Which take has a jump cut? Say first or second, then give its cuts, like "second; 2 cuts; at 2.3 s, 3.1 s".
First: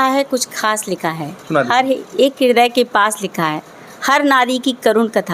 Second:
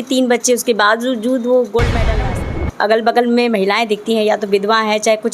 second; 1 cut; at 2.2 s